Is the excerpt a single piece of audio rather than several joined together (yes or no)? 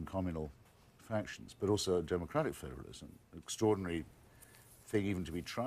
no